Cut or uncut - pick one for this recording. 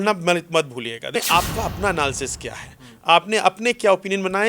cut